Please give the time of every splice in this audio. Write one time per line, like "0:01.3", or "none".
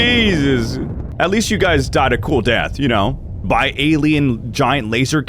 0:01.0